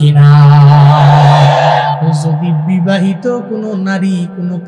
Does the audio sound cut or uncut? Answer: cut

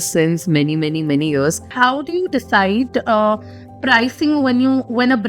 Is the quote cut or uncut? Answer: cut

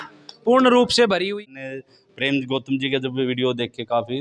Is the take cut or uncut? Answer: cut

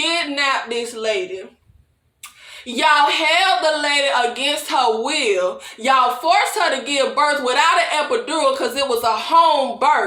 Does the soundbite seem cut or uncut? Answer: uncut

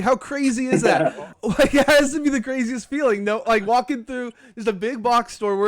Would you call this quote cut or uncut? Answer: cut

